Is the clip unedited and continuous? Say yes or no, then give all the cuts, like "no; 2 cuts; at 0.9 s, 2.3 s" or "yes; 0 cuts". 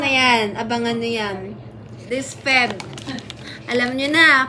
no; 1 cut; at 1.9 s